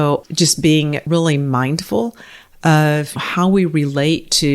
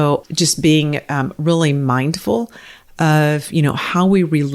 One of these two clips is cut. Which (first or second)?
first